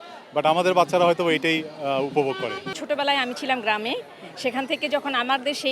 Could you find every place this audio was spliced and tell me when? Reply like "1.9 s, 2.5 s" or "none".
2.7 s